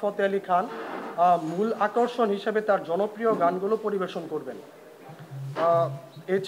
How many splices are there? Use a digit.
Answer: 0